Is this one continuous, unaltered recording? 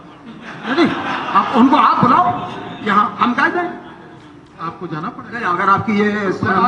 yes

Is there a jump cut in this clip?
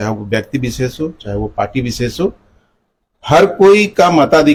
no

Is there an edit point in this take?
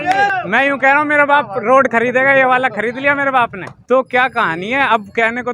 yes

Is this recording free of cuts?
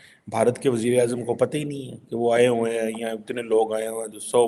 yes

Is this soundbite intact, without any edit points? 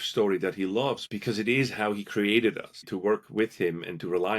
no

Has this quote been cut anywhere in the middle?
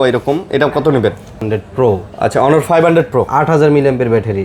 yes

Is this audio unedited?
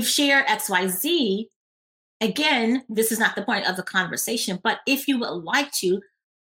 no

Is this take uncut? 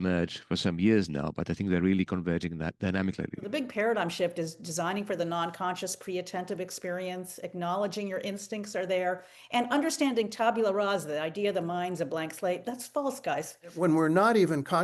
no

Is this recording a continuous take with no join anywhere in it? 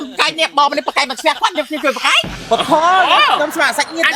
yes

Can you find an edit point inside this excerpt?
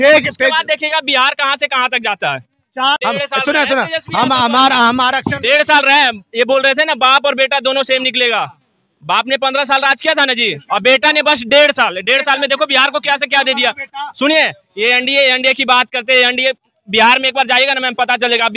yes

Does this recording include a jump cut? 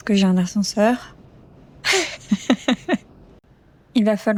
no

